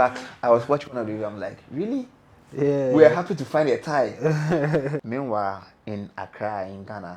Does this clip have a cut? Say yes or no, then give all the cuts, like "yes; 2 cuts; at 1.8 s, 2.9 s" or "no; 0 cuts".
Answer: yes; 1 cut; at 5.0 s